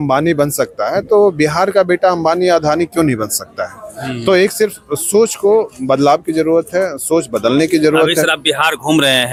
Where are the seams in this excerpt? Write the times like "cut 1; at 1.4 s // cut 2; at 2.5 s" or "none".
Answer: none